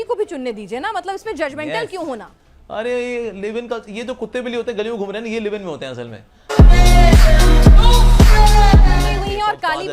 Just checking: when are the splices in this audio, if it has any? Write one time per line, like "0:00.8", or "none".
0:02.3
0:09.1